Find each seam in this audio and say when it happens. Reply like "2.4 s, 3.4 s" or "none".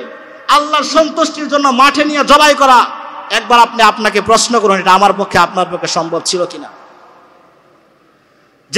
none